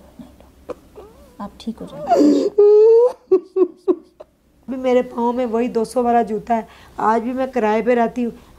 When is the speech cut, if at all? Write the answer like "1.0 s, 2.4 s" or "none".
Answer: 4.7 s

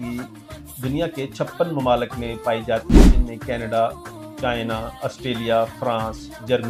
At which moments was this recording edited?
none

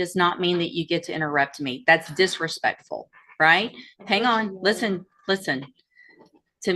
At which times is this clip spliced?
none

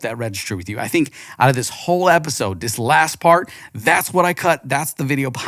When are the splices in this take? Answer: none

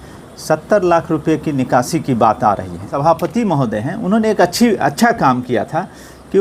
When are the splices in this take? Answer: 2.8 s

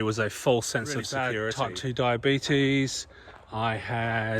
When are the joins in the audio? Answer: 1.4 s

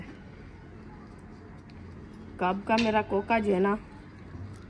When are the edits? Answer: 1.7 s

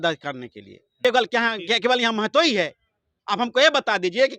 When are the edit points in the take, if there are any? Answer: 1.0 s

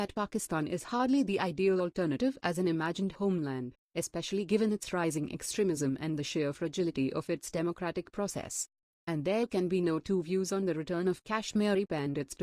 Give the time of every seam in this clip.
5.4 s

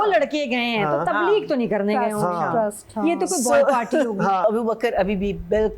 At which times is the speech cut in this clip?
4.4 s

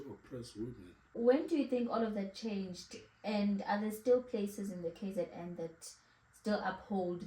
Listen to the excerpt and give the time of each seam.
1.2 s

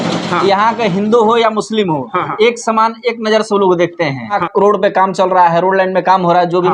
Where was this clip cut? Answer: 4.4 s

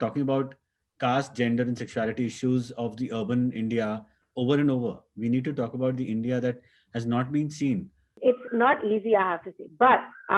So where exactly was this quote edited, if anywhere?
8.2 s

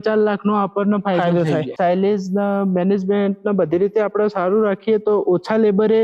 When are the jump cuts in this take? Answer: 1.8 s

